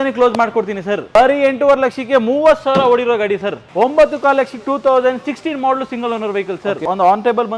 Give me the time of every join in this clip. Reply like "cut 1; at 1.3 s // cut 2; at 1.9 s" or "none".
cut 1; at 1.1 s // cut 2; at 3.7 s // cut 3; at 6.8 s